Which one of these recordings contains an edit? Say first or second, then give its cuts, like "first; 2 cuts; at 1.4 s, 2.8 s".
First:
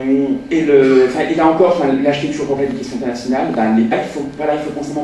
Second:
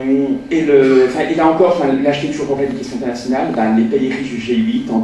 second; 1 cut; at 3.9 s